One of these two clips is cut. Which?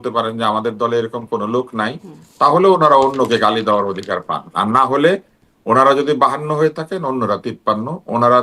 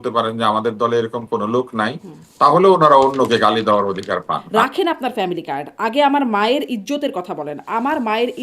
second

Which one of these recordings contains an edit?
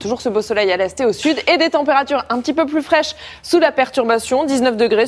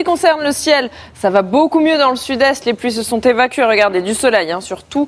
second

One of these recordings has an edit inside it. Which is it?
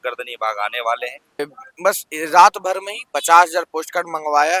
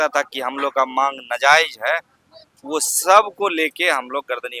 first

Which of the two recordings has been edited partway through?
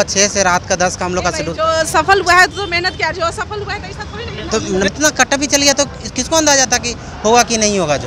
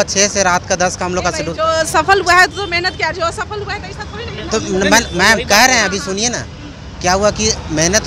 first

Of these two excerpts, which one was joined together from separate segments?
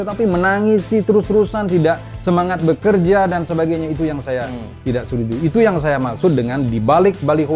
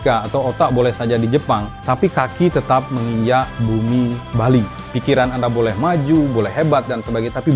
second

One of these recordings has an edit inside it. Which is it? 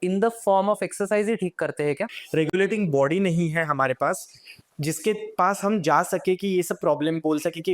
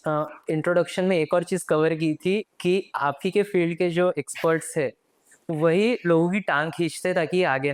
first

